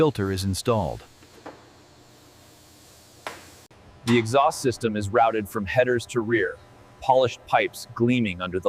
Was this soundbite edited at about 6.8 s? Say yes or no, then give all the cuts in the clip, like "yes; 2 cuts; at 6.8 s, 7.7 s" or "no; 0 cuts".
no; 1 cut; at 3.8 s